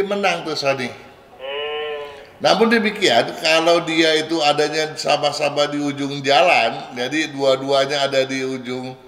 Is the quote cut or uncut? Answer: uncut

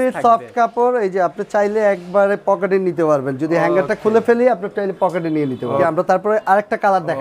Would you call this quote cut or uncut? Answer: uncut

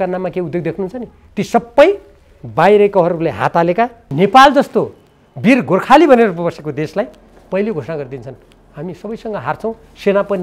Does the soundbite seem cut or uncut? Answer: cut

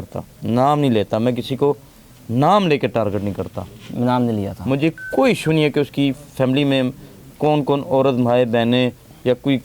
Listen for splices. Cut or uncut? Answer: uncut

